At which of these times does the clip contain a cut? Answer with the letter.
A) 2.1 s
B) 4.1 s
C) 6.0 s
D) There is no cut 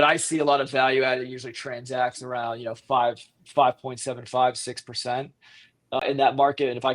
C